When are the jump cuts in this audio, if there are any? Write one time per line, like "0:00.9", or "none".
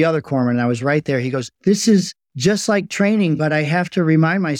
0:02.2